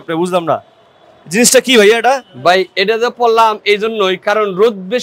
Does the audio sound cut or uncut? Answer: uncut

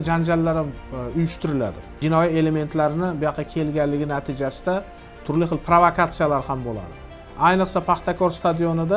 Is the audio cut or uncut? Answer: cut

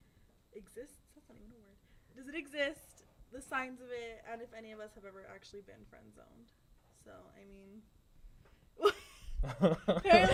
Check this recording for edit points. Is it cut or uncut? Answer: uncut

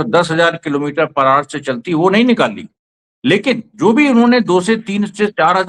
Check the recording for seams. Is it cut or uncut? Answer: uncut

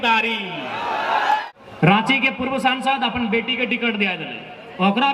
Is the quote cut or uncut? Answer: cut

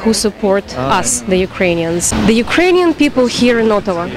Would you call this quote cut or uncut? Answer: cut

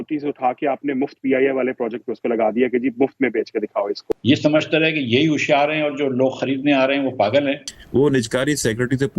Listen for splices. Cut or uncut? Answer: cut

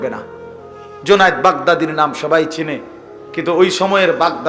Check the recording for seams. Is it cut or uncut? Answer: uncut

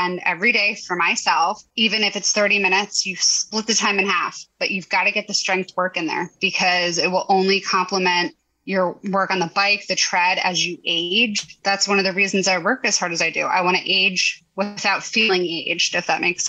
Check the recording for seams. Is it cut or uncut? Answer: uncut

